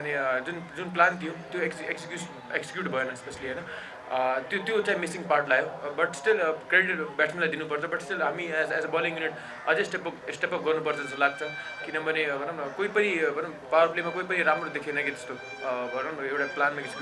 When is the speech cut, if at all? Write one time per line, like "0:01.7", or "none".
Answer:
none